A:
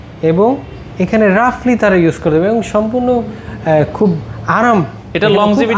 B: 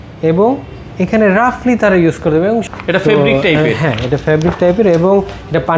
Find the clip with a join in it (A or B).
B